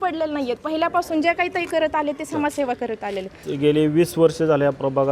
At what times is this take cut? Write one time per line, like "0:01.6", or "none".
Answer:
0:03.4